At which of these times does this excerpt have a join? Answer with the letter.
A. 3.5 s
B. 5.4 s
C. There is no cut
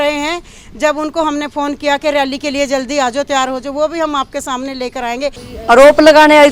B